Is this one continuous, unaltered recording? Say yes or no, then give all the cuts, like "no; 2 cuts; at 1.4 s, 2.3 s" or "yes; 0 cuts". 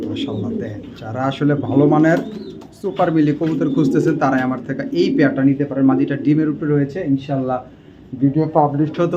yes; 0 cuts